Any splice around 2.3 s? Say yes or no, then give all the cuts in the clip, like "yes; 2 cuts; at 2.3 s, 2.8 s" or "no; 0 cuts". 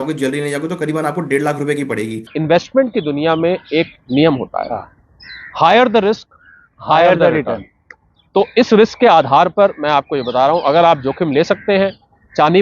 yes; 1 cut; at 2.3 s